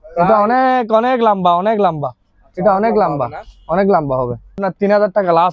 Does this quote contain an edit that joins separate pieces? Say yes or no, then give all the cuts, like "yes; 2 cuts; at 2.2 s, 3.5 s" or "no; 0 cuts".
yes; 1 cut; at 4.6 s